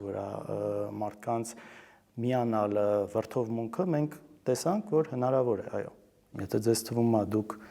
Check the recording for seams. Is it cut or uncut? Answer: cut